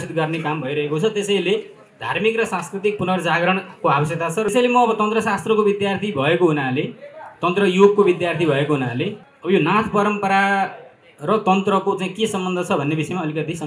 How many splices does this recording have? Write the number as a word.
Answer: two